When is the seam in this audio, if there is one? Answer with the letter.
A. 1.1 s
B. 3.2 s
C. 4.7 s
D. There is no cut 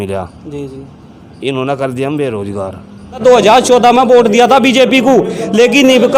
B